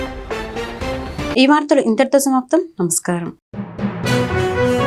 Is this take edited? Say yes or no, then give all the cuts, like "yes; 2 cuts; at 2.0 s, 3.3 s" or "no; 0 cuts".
no; 0 cuts